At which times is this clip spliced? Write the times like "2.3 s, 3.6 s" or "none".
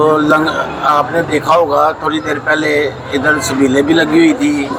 none

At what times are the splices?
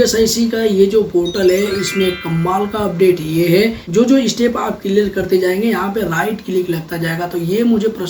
3.8 s

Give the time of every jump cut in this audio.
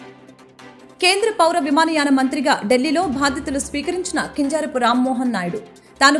none

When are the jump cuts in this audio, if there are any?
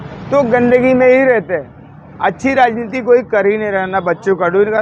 none

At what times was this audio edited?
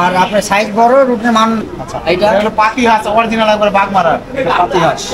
1.6 s

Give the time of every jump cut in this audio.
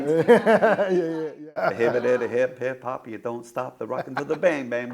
1.5 s

